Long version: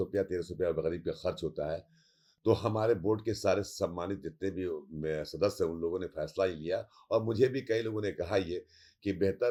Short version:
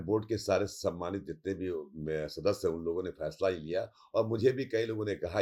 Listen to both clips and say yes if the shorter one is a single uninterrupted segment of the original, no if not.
yes